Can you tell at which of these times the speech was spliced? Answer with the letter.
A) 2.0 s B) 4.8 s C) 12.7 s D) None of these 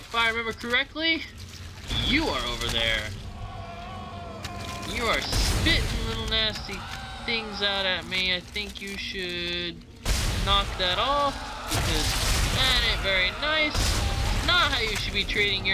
A